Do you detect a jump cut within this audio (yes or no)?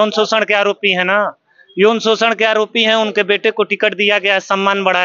no